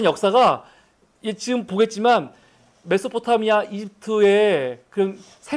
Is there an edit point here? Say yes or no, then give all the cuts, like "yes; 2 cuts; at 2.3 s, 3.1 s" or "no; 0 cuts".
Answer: yes; 1 cut; at 2.1 s